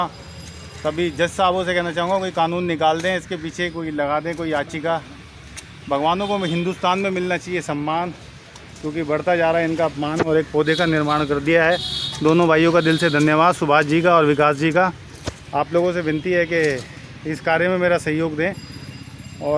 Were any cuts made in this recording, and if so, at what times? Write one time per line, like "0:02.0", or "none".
none